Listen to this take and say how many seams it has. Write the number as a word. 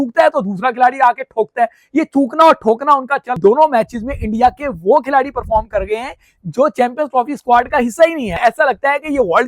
two